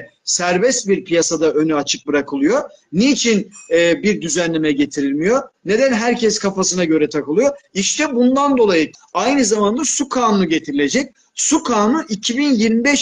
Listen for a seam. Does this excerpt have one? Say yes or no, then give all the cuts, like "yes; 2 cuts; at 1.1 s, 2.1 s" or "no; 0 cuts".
yes; 1 cut; at 9.0 s